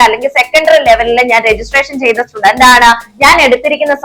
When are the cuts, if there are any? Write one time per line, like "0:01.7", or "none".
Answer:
none